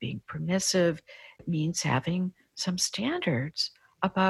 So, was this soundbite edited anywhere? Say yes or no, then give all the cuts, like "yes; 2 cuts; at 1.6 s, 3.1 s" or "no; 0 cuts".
yes; 1 cut; at 1.4 s